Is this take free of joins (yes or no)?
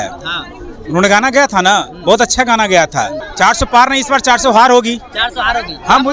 no